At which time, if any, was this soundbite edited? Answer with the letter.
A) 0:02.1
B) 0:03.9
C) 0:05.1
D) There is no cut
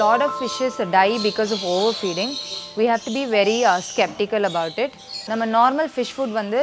C